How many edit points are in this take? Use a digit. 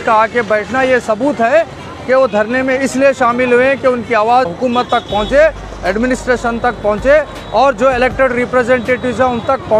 1